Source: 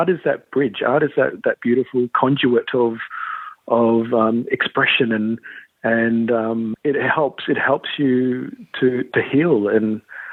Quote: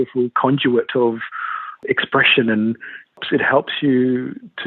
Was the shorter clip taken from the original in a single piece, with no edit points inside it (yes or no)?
no